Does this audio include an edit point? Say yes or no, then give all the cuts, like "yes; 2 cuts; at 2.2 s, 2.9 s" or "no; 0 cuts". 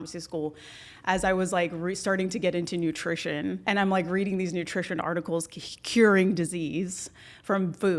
yes; 1 cut; at 3.6 s